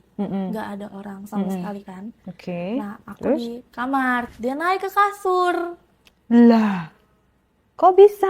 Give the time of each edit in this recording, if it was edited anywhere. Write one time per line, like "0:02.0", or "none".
0:04.3